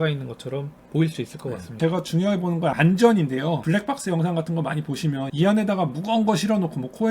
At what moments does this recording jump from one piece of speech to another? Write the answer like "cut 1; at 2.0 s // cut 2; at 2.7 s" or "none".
cut 1; at 1.8 s // cut 2; at 2.8 s // cut 3; at 3.6 s // cut 4; at 5.3 s